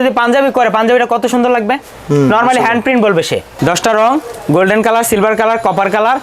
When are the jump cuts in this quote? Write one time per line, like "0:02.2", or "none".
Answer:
0:03.5